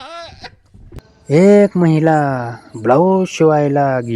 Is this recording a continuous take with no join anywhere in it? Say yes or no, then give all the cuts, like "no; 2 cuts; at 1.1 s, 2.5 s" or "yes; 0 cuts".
no; 1 cut; at 1.1 s